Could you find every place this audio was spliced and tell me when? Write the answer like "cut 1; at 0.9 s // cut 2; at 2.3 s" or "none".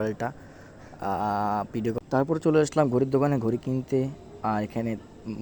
cut 1; at 2.0 s